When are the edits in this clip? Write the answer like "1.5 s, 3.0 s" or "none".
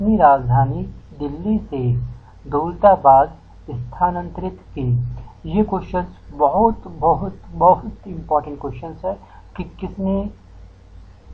none